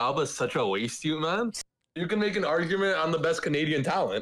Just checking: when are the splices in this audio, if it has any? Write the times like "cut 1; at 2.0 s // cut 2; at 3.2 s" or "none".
cut 1; at 1.6 s